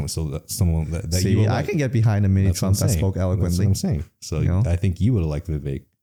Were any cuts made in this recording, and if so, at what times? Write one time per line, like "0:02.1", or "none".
none